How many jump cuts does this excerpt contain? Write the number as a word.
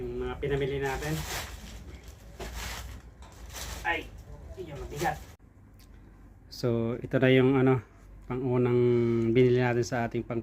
one